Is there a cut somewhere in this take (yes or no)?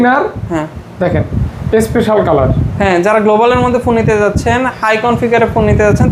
no